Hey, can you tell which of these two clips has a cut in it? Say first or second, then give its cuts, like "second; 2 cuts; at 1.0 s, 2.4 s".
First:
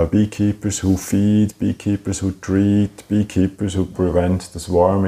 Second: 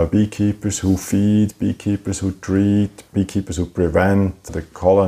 second; 1 cut; at 3.0 s